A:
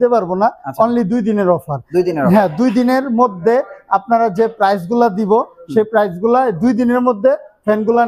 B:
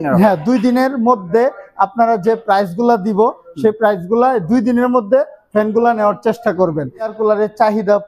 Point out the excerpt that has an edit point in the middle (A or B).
B